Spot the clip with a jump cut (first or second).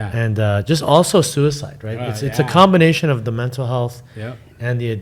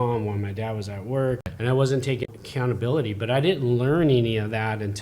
second